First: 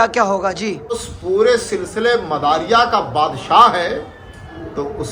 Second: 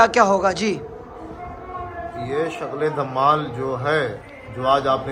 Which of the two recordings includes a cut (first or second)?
first